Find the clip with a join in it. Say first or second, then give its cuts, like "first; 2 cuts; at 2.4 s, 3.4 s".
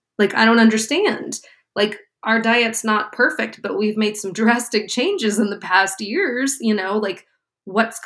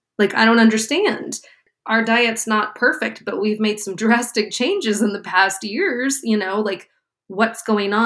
second; 1 cut; at 1.6 s